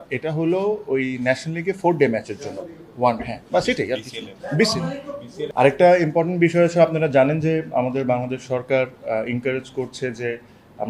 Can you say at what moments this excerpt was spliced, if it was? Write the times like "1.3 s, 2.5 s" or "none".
5.5 s